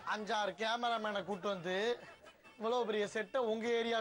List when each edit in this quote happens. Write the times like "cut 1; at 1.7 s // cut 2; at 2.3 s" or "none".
none